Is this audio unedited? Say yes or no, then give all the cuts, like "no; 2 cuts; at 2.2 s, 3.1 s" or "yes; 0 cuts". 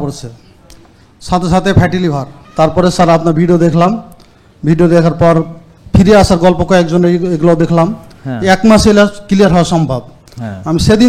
no; 1 cut; at 2.4 s